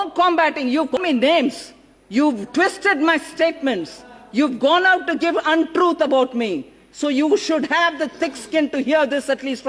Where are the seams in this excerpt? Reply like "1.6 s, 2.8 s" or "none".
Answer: 0.9 s